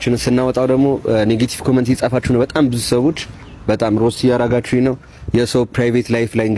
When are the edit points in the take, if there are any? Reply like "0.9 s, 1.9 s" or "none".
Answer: none